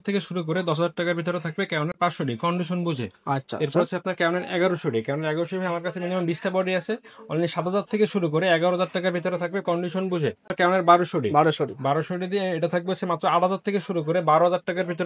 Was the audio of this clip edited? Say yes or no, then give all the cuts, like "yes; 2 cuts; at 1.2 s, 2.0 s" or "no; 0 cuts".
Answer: no; 0 cuts